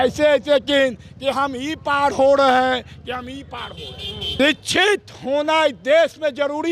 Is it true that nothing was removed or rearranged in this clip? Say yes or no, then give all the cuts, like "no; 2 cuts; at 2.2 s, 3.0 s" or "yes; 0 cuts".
no; 1 cut; at 4.2 s